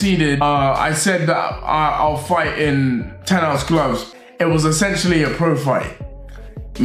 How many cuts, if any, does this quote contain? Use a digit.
0